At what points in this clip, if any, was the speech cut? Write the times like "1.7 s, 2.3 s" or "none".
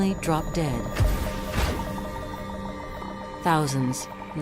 none